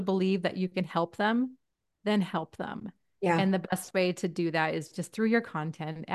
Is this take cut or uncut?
uncut